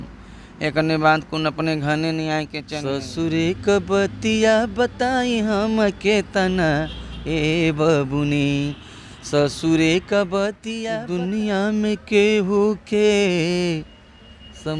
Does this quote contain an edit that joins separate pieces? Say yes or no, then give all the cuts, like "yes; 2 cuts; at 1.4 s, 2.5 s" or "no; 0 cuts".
yes; 2 cuts; at 2.6 s, 10.7 s